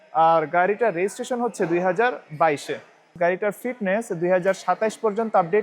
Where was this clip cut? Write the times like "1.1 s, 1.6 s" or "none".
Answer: 3.1 s